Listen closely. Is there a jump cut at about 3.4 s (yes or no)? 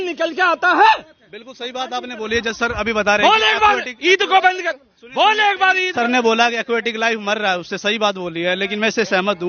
no